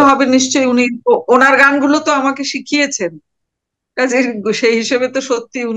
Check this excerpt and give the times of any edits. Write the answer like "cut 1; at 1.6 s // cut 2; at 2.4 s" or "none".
none